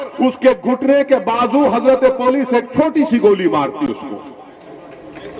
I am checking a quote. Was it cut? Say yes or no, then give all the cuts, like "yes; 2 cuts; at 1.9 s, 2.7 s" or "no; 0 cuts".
no; 0 cuts